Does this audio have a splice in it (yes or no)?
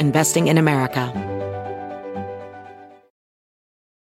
yes